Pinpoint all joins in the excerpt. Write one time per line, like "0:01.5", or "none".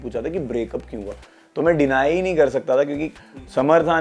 0:03.1